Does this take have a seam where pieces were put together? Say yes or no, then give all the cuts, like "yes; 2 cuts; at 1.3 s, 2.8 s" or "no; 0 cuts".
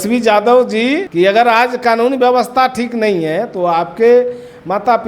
yes; 1 cut; at 1.1 s